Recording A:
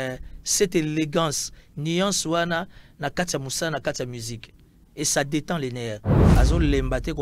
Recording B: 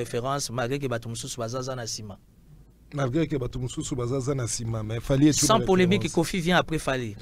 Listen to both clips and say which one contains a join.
A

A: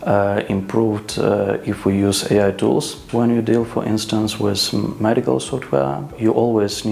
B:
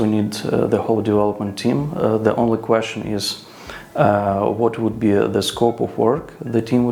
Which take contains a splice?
A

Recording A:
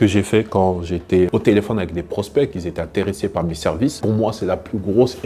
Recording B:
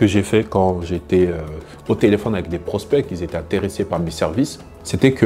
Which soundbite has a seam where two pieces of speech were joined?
A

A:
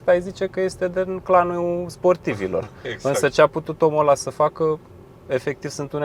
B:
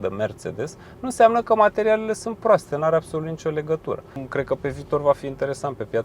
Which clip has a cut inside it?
B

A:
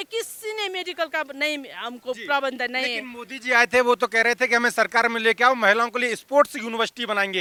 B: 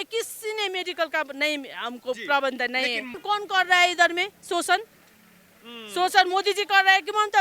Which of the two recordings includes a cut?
B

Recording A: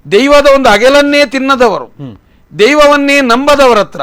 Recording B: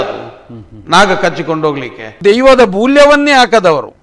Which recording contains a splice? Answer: B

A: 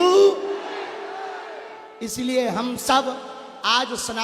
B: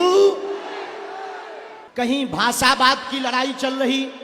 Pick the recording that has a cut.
B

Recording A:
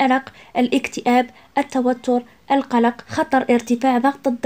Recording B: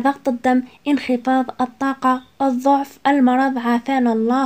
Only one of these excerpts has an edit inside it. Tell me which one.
A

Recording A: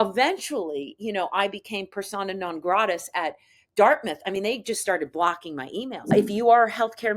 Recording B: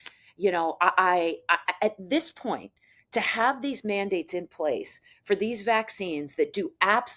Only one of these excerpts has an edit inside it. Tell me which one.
A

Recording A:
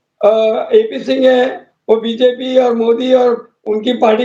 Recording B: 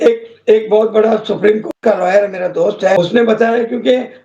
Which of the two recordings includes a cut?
B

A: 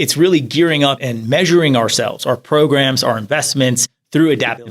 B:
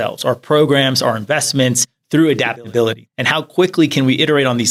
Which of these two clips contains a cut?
A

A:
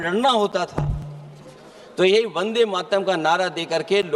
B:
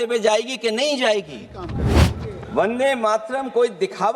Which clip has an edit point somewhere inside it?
B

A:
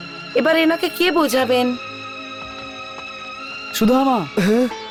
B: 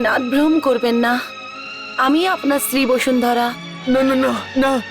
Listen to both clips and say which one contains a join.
B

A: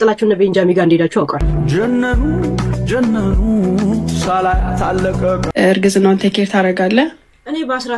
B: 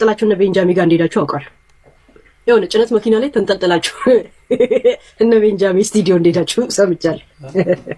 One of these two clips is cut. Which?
A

